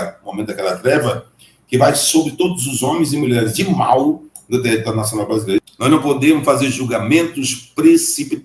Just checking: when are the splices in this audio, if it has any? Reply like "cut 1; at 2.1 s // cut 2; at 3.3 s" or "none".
cut 1; at 5.6 s